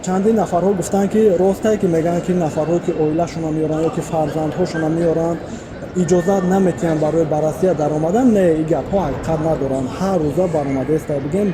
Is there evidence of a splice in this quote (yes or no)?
no